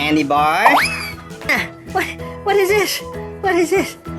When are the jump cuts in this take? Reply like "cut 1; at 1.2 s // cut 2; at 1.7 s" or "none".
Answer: cut 1; at 1.5 s